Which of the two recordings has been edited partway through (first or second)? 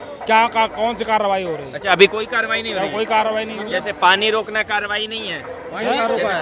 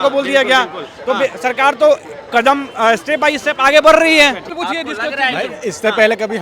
second